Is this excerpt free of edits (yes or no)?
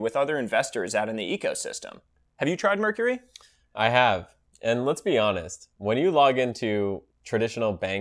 yes